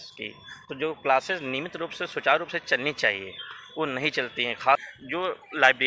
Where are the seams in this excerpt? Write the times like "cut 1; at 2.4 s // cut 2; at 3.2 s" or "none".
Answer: cut 1; at 4.8 s